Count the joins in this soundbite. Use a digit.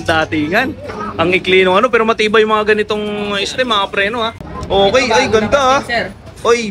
1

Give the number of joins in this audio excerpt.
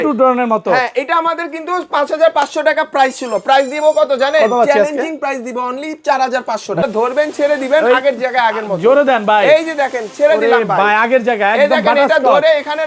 1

